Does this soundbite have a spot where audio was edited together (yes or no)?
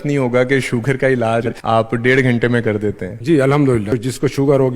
yes